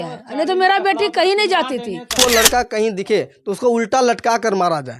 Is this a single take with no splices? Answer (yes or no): no